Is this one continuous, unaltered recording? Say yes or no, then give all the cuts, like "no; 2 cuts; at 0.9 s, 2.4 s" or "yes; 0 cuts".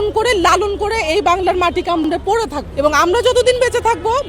no; 1 cut; at 2.1 s